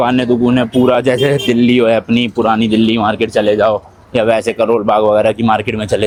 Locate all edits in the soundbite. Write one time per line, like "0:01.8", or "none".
none